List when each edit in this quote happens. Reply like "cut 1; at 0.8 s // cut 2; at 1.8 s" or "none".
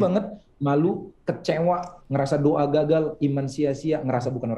none